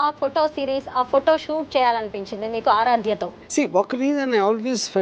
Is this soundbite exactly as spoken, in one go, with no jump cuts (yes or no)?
yes